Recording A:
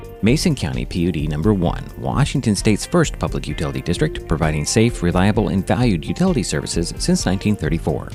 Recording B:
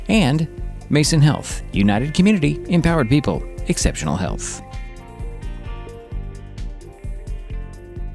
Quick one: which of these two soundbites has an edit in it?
B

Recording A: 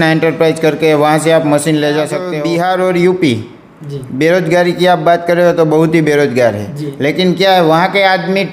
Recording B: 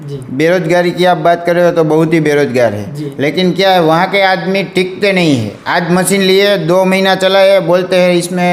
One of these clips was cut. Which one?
A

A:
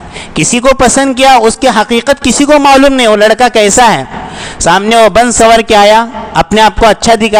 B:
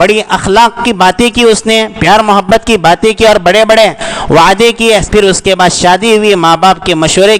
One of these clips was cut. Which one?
B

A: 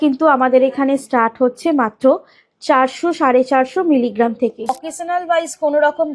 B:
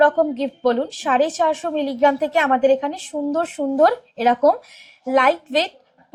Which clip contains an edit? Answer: A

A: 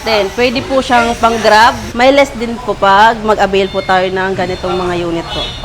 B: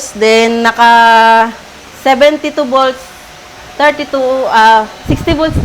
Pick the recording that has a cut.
A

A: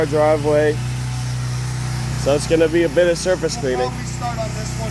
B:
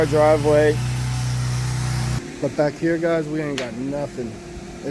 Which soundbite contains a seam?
B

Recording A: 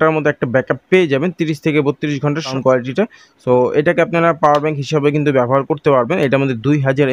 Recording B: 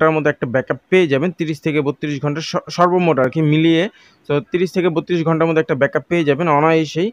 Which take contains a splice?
A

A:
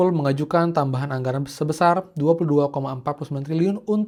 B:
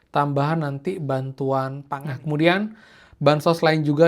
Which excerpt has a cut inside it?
B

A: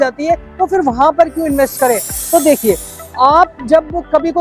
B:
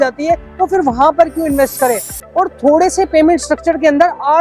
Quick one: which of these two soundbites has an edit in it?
B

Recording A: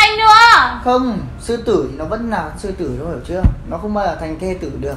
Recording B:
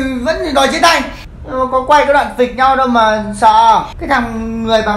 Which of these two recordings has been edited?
B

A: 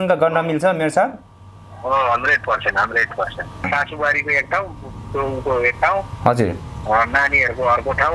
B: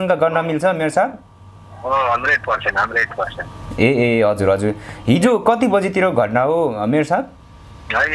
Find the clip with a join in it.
A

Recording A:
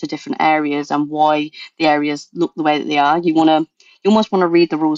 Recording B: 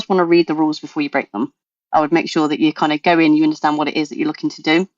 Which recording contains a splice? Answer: B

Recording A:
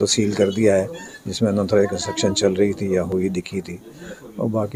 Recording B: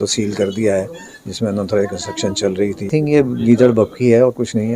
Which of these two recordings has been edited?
B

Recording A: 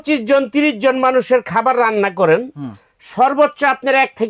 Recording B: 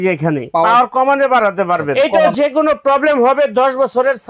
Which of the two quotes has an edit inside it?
B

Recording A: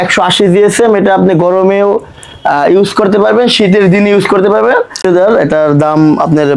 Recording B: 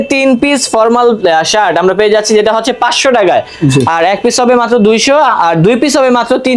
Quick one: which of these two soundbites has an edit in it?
A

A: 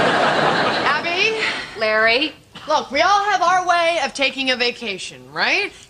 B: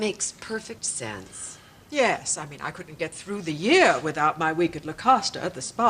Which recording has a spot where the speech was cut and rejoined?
B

